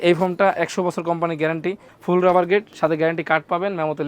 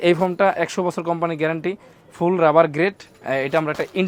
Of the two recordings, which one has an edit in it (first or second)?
first